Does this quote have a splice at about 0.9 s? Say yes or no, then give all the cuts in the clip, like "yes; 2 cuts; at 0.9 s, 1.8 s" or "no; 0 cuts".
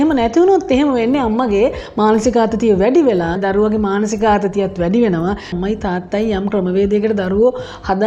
no; 2 cuts; at 3.4 s, 5.5 s